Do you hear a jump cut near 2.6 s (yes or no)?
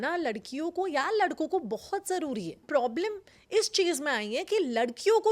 yes